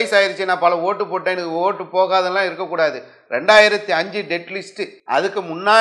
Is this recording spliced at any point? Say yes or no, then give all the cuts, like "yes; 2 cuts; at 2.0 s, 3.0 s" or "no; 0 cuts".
yes; 1 cut; at 4.9 s